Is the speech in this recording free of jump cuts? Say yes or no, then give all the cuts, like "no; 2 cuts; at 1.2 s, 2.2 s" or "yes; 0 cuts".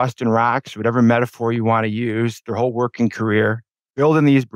yes; 0 cuts